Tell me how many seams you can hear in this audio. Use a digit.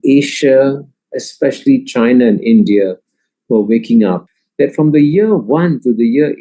1